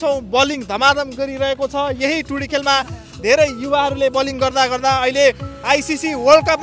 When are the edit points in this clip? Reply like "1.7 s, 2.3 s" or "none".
none